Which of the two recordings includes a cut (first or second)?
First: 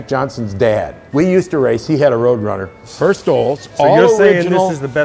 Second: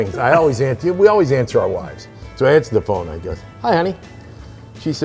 first